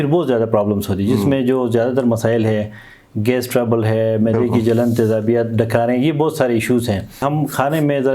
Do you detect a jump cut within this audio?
yes; 1 cut; at 7.2 s

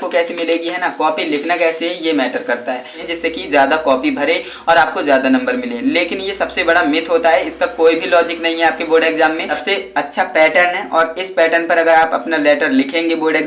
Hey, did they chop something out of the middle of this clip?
yes; 2 cuts; at 3.0 s, 9.5 s

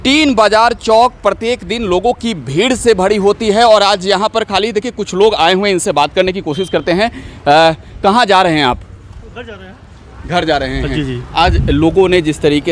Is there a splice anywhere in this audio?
no; 0 cuts

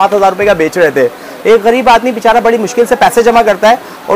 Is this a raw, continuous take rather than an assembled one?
yes; 0 cuts

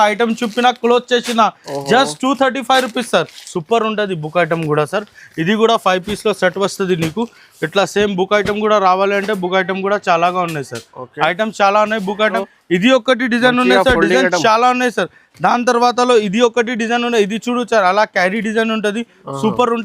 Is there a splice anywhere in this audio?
yes; 2 cuts; at 3.4 s, 12.2 s

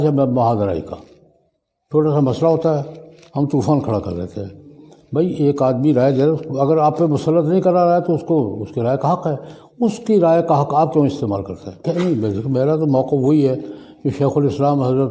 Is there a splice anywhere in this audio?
yes; 1 cut; at 11.8 s

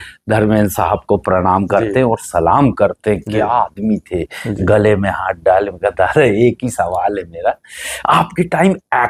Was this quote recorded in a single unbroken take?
yes; 0 cuts

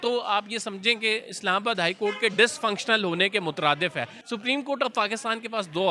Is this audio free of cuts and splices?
no; 1 cut; at 4.2 s

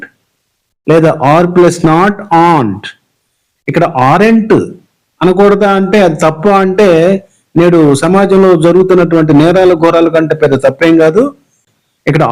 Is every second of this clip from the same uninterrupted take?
yes; 0 cuts

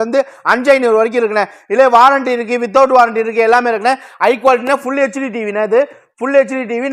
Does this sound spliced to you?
no; 0 cuts

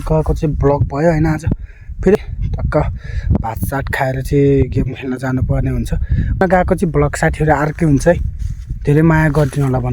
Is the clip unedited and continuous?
no; 2 cuts; at 2.2 s, 6.4 s

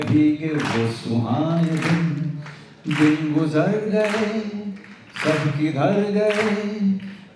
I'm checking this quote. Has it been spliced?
no; 0 cuts

